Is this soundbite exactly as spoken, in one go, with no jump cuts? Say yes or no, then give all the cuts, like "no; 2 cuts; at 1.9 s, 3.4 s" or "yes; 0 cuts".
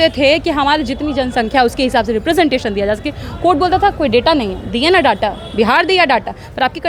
yes; 0 cuts